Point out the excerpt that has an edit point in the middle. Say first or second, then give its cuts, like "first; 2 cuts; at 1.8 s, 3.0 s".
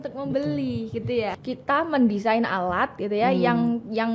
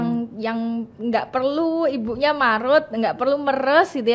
first; 1 cut; at 1.3 s